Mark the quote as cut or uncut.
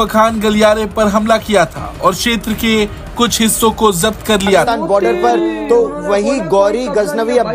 cut